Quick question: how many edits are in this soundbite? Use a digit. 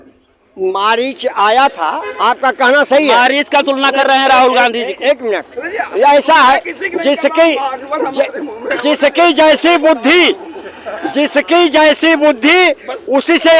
0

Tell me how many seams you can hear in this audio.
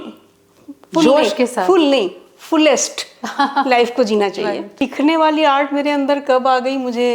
1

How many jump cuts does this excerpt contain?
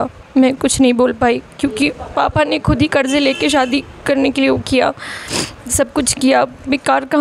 0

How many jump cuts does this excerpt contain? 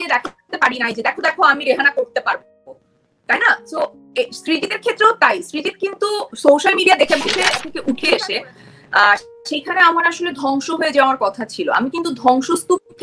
1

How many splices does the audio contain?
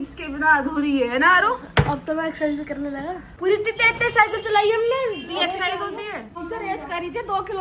2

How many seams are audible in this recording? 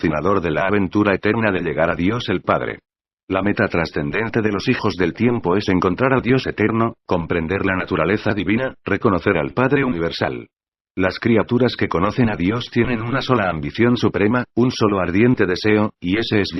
1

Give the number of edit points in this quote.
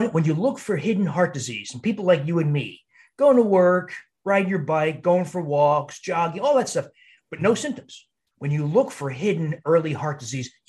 0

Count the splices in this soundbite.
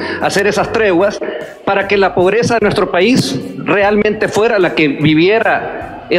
0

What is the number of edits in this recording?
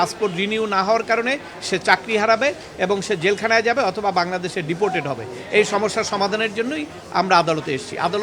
0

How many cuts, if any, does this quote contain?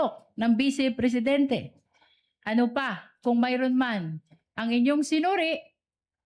0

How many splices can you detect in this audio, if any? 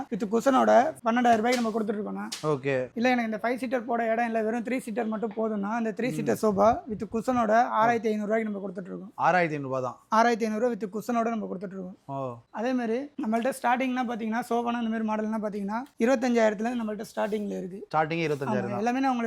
0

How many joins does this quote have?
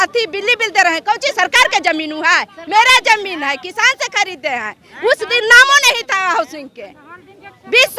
0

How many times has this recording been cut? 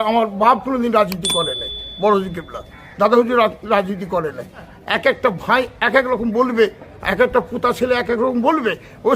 1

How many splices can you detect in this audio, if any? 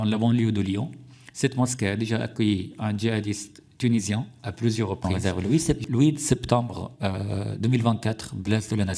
1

